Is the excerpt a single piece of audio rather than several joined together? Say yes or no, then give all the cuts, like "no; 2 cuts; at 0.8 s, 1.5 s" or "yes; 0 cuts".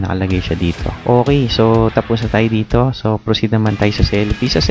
no; 1 cut; at 0.9 s